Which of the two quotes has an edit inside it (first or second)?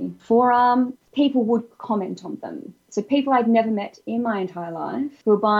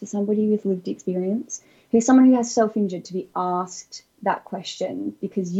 first